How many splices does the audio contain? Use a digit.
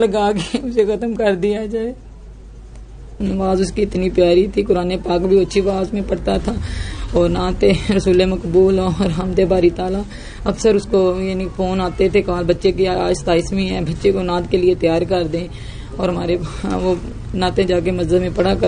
1